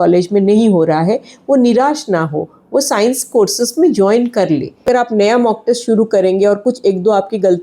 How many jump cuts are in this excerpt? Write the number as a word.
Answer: one